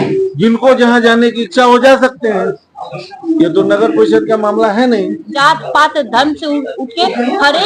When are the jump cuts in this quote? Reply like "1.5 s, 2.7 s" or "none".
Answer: 5.3 s